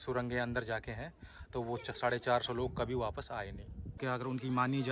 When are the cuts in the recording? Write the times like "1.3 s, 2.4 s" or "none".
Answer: 4.0 s